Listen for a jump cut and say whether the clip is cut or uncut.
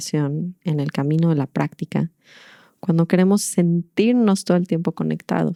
uncut